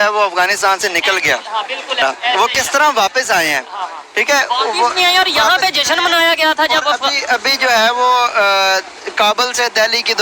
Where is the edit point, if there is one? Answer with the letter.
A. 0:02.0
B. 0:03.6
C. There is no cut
A